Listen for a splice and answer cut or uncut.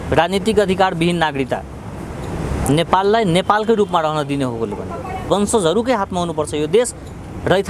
cut